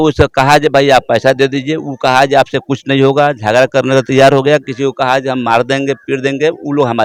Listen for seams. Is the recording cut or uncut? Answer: uncut